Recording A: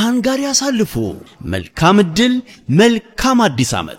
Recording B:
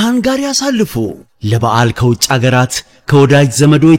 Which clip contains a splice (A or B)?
B